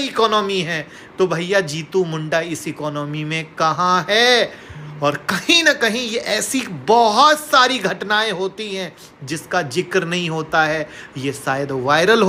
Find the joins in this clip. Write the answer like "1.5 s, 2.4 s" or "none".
none